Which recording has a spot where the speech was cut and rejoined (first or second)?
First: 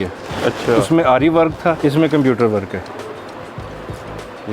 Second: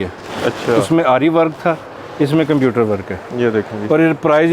first